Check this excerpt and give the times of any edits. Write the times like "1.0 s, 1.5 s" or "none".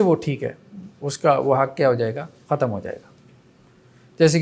none